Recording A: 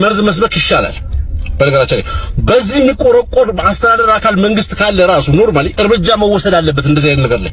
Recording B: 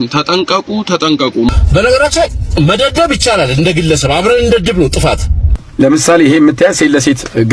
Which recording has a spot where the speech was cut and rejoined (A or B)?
B